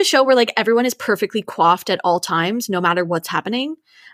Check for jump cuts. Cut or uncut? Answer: uncut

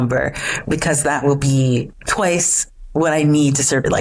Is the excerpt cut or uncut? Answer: uncut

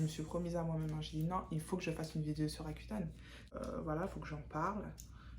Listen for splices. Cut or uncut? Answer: cut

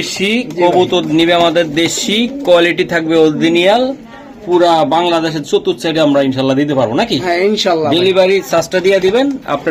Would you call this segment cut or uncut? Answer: uncut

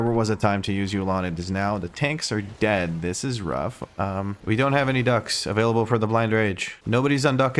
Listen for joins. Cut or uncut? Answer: cut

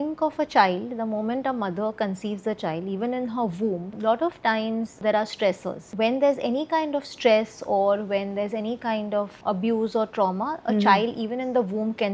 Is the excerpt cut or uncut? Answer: cut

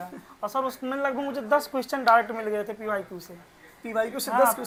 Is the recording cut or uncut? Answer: uncut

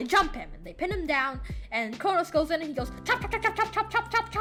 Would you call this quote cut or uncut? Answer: uncut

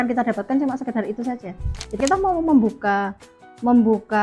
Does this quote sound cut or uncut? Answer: cut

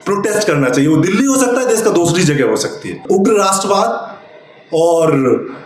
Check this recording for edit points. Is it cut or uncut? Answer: cut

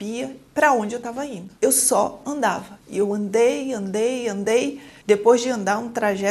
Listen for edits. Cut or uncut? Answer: uncut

